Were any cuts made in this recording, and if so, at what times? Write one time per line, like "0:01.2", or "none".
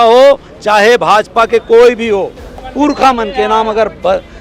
0:02.6